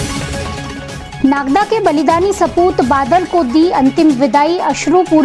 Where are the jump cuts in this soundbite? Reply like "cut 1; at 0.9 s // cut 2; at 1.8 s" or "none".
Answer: cut 1; at 1.1 s